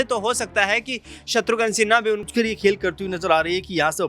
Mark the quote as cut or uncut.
cut